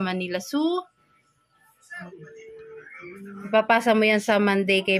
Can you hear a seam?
yes; 1 cut; at 2.0 s

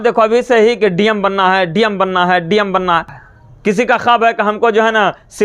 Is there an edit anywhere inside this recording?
yes; 1 cut; at 3.1 s

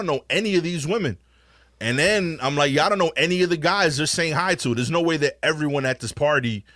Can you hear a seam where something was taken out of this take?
no; 0 cuts

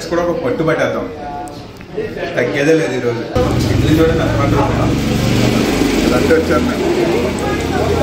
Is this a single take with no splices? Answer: yes; 0 cuts

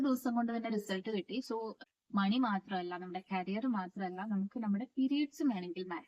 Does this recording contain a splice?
yes; 1 cut; at 1.7 s

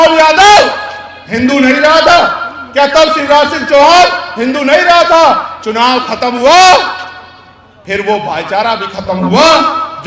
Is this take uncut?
yes; 0 cuts

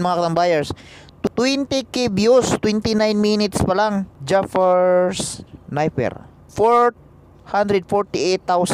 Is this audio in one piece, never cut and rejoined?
no; 3 cuts; at 1.3 s, 4.1 s, 6.5 s

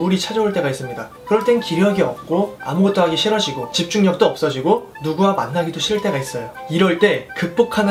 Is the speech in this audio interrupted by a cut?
no; 0 cuts

